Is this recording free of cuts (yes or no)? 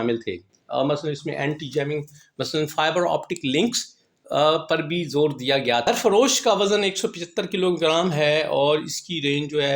no